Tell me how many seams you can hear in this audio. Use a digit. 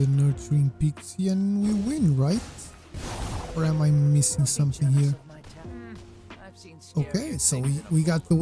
0